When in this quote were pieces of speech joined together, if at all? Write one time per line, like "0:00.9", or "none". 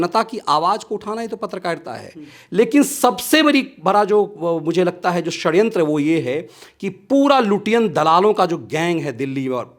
none